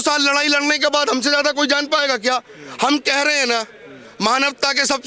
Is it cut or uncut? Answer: uncut